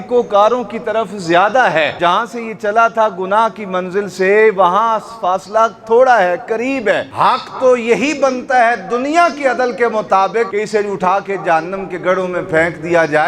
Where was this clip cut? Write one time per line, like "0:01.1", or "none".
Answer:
0:02.0
0:07.1
0:10.5